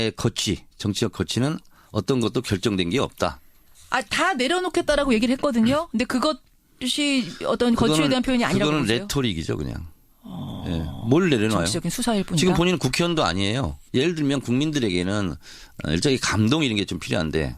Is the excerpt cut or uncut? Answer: cut